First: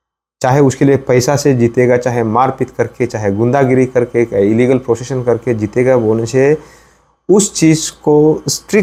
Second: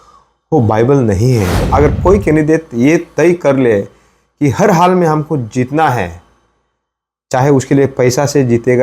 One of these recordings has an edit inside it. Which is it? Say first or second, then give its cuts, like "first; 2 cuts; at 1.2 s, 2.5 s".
second; 1 cut; at 1.6 s